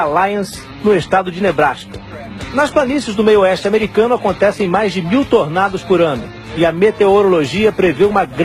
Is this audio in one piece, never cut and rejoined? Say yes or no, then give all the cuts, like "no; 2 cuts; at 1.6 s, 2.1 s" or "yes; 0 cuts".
no; 1 cut; at 1.0 s